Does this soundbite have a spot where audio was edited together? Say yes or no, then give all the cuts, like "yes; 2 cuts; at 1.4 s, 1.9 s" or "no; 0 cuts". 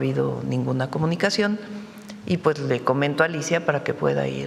no; 0 cuts